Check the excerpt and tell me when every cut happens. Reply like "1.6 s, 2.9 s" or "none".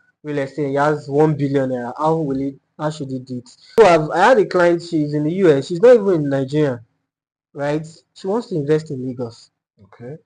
3.8 s